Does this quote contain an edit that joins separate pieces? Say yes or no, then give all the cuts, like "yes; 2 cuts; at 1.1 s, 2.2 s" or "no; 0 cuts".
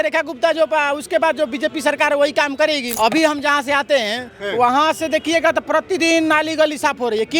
yes; 1 cut; at 2.9 s